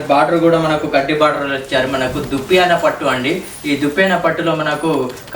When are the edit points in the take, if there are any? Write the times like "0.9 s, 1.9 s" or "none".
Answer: none